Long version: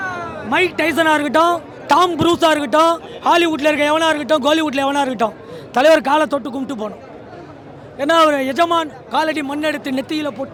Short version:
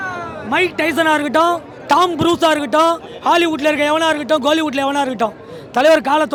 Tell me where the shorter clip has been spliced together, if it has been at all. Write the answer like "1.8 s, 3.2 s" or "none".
none